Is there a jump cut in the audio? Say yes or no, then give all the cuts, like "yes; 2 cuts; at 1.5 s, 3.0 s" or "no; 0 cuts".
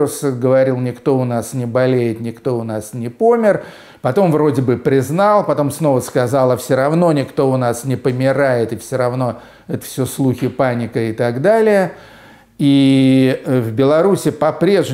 no; 0 cuts